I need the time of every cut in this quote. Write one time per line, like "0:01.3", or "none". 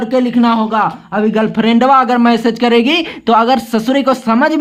none